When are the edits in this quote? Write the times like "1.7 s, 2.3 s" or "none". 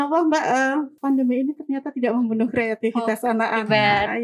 0.9 s